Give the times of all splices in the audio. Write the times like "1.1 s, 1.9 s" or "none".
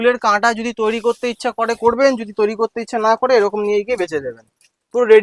none